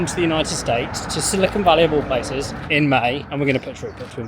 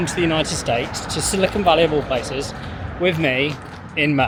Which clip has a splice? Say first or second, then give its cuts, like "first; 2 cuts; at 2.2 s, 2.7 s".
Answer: first; 2 cuts; at 2.6 s, 3.2 s